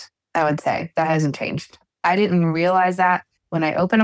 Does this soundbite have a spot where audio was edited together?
no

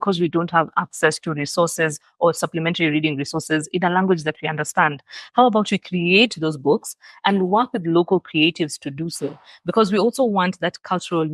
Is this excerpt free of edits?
yes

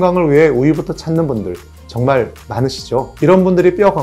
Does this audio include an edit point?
yes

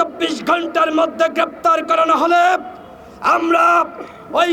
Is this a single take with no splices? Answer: yes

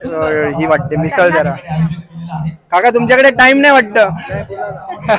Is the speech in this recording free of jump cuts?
yes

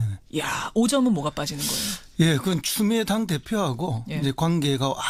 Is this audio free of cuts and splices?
yes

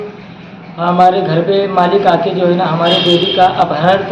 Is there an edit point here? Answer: no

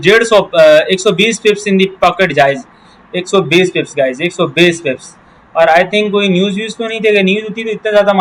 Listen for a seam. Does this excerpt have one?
no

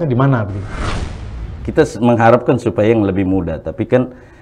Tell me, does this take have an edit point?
yes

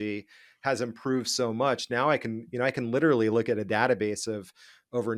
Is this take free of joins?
yes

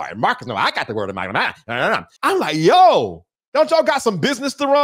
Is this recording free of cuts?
yes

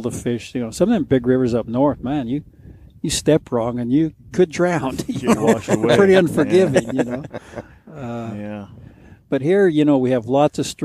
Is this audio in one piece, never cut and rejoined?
yes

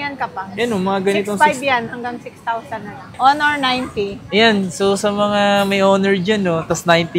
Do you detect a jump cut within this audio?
yes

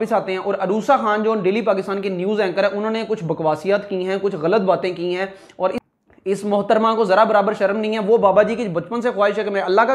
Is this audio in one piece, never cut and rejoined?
no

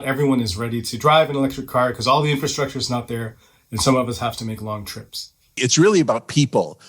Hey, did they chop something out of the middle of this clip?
yes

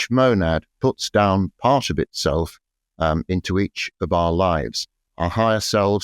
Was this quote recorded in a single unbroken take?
no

